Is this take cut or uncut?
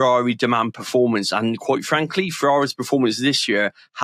uncut